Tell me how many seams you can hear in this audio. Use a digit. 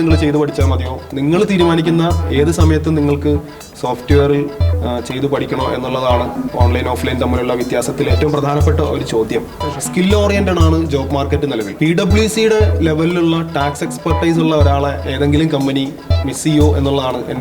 2